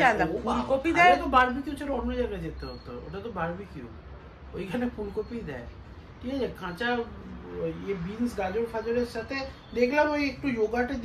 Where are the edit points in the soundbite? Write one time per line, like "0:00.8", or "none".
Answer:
none